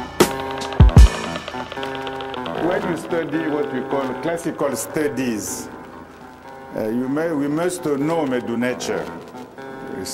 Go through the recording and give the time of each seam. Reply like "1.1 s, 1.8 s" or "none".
1.0 s